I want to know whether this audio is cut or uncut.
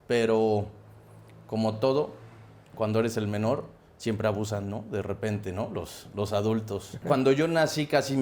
cut